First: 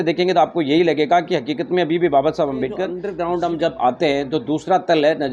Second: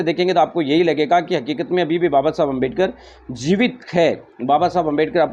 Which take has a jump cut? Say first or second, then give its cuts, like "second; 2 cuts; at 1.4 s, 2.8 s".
first; 1 cut; at 3.1 s